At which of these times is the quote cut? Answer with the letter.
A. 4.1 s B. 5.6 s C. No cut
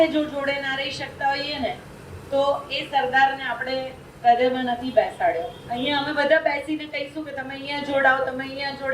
B